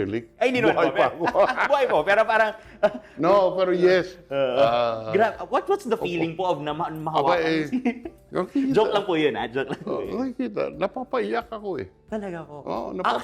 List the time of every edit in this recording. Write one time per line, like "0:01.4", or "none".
none

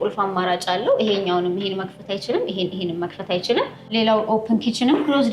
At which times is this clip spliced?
0:03.8

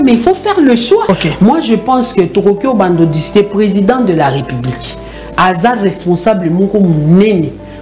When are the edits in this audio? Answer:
0:01.1

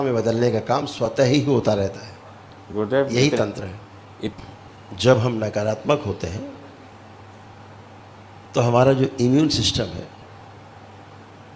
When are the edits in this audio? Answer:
0:04.3
0:06.9
0:10.2

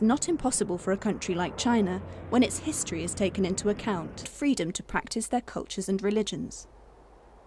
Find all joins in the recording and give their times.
none

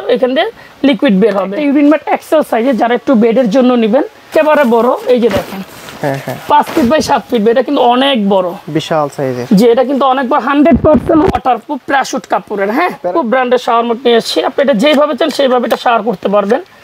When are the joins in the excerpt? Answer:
0:01.5
0:04.3
0:13.0

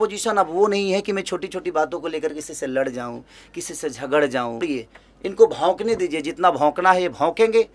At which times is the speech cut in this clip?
0:04.6

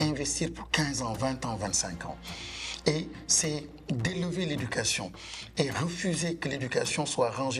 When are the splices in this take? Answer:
none

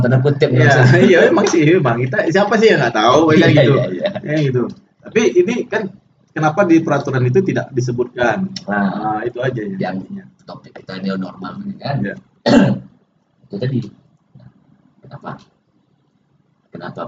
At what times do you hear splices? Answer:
none

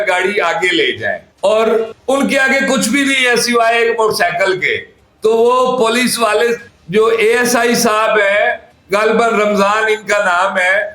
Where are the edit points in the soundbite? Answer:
none

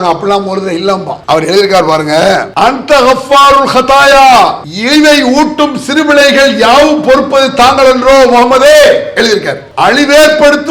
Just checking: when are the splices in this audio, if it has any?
0:01.1
0:02.5
0:04.7
0:09.6

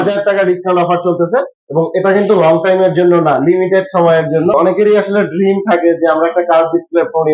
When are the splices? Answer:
0:04.5

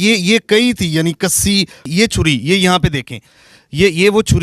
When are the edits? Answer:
0:01.9

